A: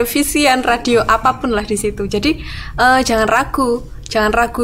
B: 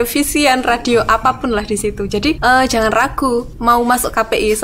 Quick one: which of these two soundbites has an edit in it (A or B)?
B